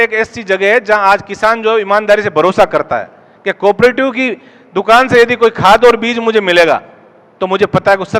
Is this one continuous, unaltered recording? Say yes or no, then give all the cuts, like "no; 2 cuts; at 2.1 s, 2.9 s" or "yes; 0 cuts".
yes; 0 cuts